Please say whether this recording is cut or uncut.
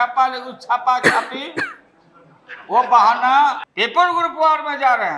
cut